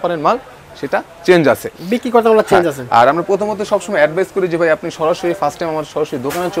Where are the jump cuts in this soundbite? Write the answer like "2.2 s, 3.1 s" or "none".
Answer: none